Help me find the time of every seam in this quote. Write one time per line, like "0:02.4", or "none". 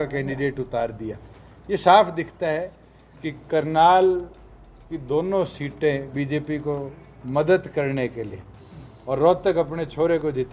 none